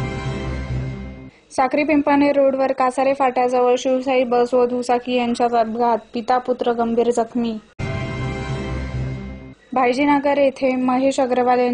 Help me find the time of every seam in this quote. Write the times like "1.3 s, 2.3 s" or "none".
1.0 s